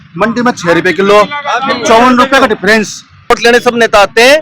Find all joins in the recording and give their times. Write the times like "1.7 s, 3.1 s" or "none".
3.3 s